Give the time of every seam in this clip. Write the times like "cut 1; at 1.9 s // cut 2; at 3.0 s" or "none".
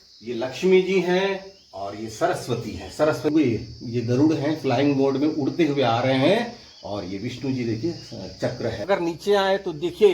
cut 1; at 3.3 s // cut 2; at 8.8 s

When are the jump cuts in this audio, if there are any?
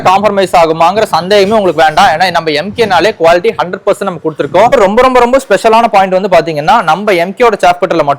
cut 1; at 4.7 s

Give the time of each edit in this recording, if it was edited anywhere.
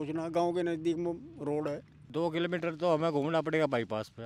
cut 1; at 2.0 s

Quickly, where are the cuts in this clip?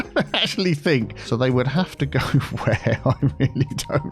cut 1; at 1.2 s

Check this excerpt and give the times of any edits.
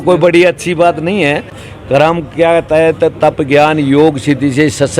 cut 1; at 1.6 s

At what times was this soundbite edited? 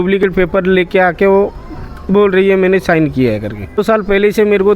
cut 1; at 3.8 s

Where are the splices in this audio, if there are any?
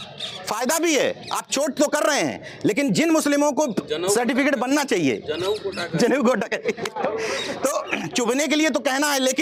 none

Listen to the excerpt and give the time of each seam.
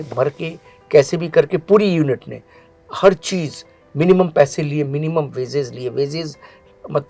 none

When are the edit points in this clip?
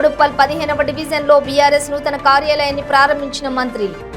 none

